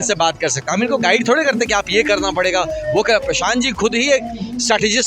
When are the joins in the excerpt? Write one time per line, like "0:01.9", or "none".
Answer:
none